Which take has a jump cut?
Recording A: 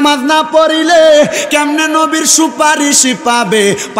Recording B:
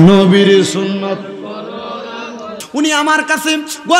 B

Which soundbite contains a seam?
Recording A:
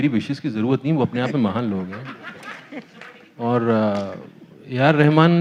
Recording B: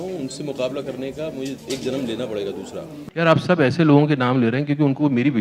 B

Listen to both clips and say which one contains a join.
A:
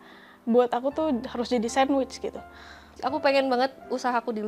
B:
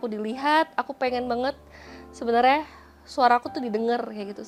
A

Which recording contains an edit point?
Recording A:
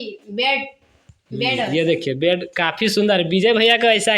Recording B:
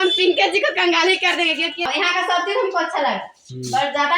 B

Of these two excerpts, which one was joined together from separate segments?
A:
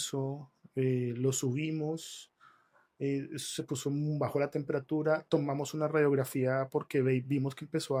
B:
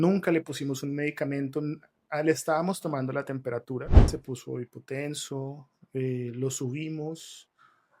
B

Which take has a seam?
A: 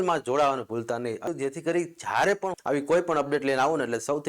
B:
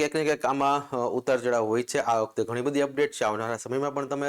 A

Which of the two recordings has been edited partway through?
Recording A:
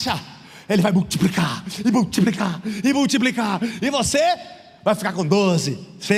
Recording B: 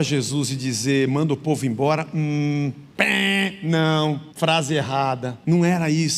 B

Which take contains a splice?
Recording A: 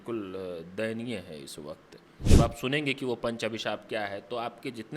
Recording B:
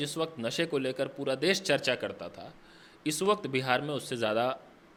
A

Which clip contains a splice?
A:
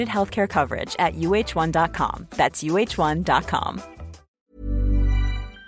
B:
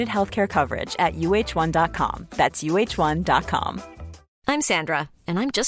A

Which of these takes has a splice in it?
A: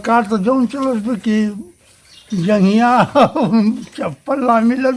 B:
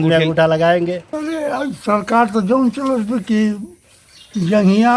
B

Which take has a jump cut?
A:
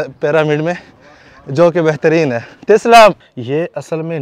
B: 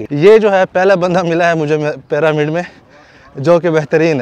A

